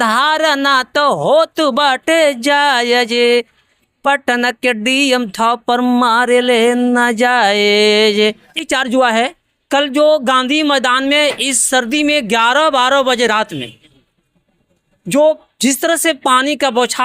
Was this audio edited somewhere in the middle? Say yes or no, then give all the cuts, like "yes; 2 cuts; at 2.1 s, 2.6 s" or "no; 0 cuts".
yes; 1 cut; at 8.7 s